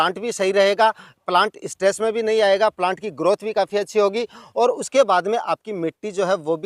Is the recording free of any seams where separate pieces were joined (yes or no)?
yes